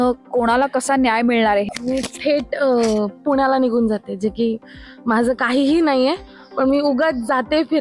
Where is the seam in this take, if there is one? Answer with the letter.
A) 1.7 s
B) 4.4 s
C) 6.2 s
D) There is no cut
A